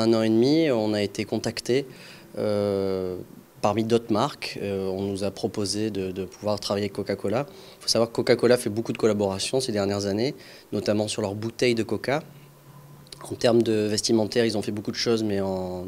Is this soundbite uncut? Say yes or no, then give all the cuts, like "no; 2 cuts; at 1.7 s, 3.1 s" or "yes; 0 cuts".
yes; 0 cuts